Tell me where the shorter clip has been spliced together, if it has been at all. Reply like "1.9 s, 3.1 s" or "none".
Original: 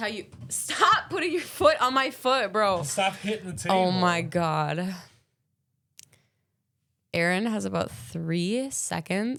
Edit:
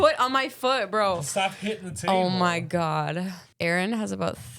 3.4 s